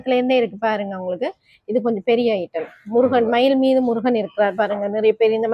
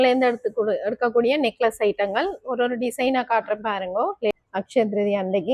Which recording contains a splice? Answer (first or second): second